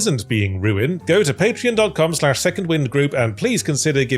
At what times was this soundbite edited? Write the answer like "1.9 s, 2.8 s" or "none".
0.9 s